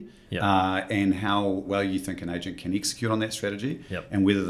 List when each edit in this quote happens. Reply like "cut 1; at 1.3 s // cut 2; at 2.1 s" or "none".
cut 1; at 1.7 s